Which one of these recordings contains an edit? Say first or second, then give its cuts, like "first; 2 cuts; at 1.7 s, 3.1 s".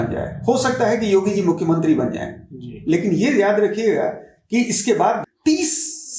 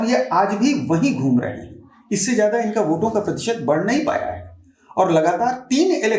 first; 1 cut; at 5.2 s